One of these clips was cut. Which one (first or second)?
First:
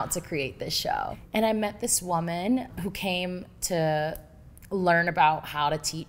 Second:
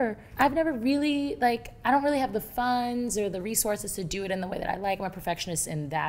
first